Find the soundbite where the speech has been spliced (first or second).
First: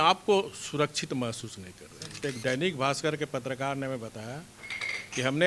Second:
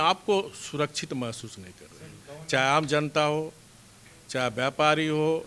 first